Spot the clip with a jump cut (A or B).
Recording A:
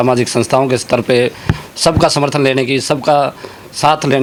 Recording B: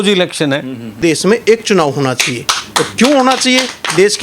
B